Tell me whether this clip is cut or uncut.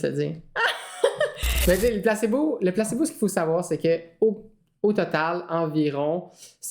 cut